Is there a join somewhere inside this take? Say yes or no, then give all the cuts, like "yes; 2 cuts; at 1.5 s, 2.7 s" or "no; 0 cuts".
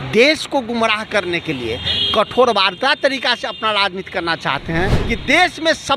yes; 1 cut; at 5.0 s